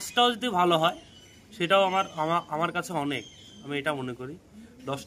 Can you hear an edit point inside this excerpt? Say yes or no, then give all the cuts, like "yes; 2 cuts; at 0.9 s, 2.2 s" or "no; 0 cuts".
no; 0 cuts